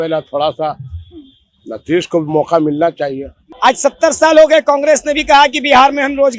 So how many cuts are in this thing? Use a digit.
1